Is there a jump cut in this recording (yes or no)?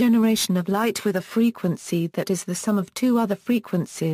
no